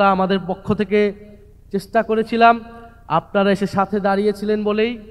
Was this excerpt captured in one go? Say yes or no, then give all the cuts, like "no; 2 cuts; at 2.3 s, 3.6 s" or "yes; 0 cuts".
yes; 0 cuts